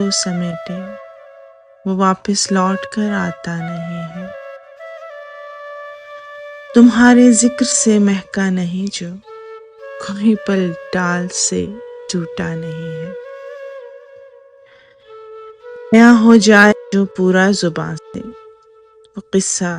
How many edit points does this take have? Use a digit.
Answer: 1